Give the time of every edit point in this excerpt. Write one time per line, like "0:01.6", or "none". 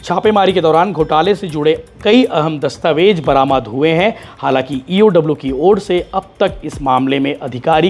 none